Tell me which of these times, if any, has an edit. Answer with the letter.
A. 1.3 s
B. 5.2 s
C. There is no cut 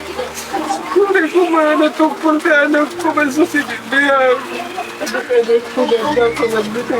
B